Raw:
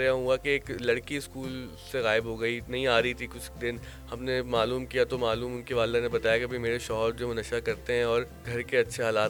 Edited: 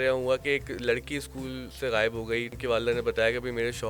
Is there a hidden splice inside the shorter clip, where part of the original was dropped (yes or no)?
yes